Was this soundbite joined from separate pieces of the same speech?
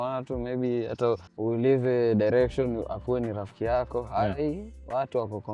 yes; 1 cut; at 1.3 s

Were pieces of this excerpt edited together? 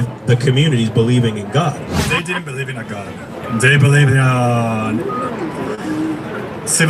yes; 1 cut; at 2.0 s

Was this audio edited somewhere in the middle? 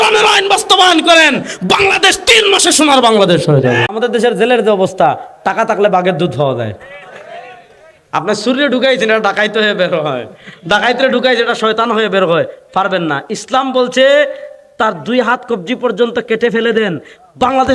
yes; 1 cut; at 4.0 s

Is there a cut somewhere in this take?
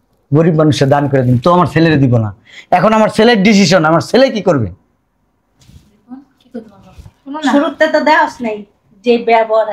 no; 0 cuts

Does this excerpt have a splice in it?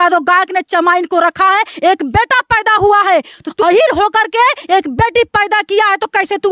yes; 1 cut; at 3.5 s

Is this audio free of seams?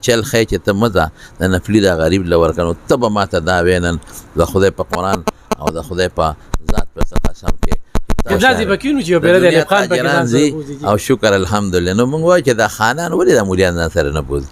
no; 1 cut; at 8.3 s

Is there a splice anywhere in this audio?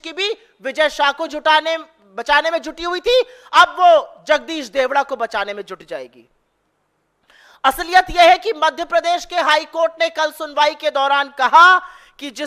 no; 0 cuts

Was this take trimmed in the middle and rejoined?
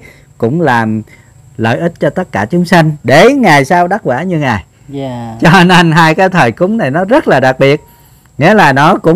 no; 0 cuts

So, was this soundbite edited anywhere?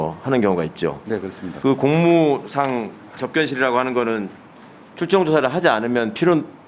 yes; 1 cut; at 1.5 s

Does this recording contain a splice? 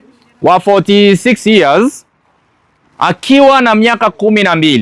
no; 0 cuts

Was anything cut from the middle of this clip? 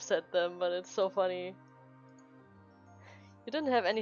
no; 0 cuts

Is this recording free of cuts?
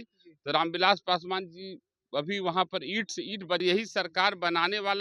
no; 1 cut; at 3.6 s

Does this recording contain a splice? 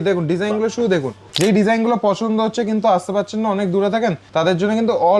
yes; 2 cuts; at 1.2 s, 4.2 s

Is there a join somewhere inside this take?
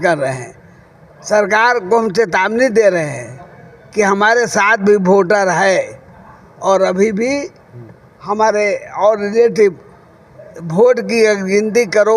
no; 0 cuts

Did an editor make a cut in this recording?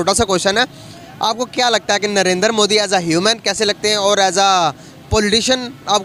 no; 0 cuts

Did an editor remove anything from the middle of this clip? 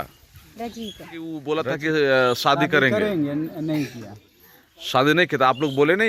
yes; 1 cut; at 1.4 s

